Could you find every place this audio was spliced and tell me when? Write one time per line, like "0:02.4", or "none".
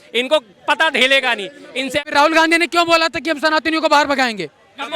0:02.1